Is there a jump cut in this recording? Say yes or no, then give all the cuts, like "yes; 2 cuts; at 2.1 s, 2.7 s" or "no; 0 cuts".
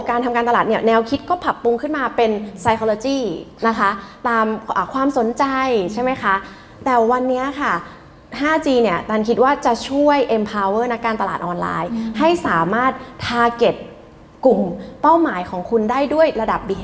no; 0 cuts